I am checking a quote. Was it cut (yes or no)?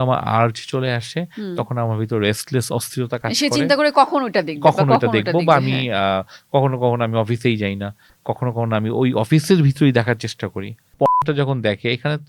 yes